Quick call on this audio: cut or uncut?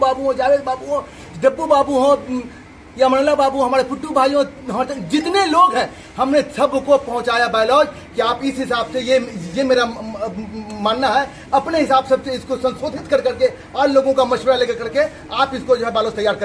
uncut